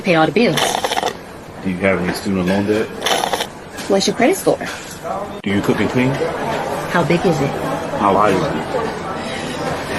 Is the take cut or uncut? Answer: cut